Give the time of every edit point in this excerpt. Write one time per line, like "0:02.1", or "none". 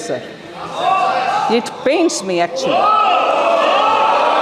none